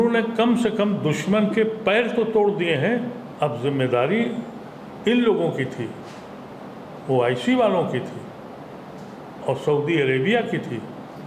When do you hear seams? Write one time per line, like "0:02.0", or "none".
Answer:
0:03.2